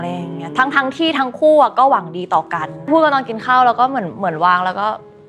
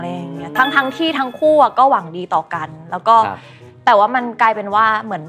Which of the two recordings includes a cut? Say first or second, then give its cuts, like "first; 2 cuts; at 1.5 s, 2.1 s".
first; 1 cut; at 2.9 s